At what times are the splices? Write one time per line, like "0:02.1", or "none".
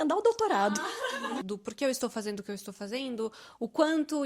0:01.4